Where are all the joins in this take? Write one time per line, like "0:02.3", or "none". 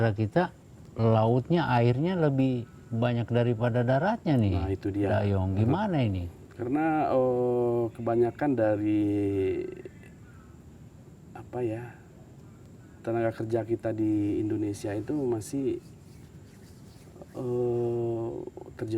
none